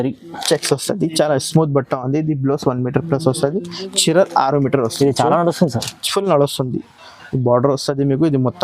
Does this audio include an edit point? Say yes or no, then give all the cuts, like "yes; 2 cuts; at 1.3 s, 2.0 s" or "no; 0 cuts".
no; 0 cuts